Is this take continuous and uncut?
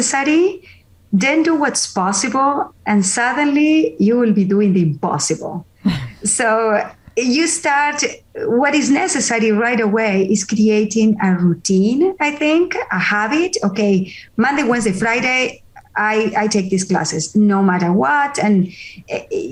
yes; 0 cuts

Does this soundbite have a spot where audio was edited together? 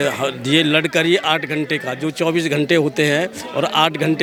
no; 0 cuts

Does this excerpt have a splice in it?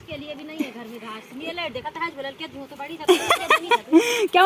no; 0 cuts

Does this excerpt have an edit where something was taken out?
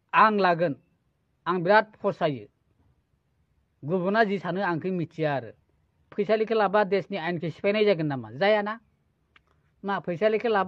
yes; 1 cut; at 6.1 s

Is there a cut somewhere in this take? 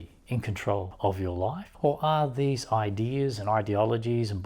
yes; 2 cuts; at 0.9 s, 1.7 s

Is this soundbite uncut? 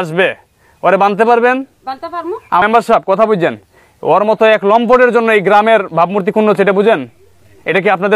no; 1 cut; at 2.6 s

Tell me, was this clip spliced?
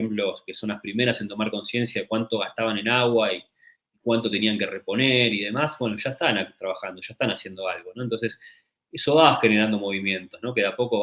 no; 0 cuts

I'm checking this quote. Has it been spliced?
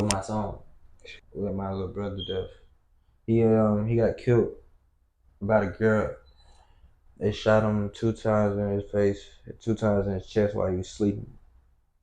yes; 1 cut; at 1.0 s

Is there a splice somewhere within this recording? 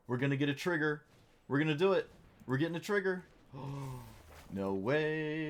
no; 0 cuts

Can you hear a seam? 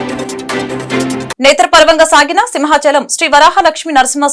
yes; 1 cut; at 1.3 s

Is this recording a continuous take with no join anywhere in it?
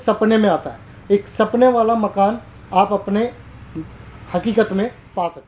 yes; 0 cuts

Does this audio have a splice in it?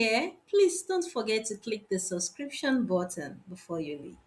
no; 0 cuts

